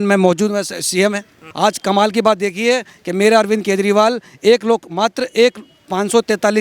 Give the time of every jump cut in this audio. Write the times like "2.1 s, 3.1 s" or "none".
1.4 s